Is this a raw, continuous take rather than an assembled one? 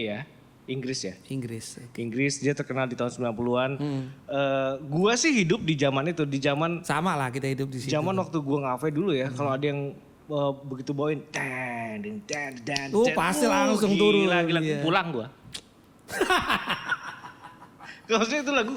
yes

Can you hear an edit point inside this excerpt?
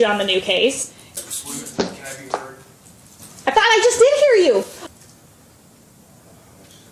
yes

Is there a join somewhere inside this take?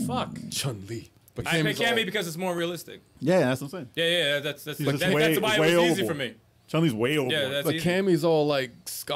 yes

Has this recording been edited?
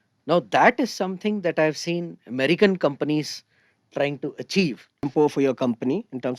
yes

